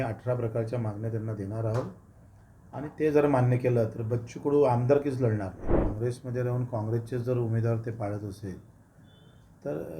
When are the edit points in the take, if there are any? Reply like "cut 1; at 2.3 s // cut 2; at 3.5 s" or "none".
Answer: cut 1; at 5.6 s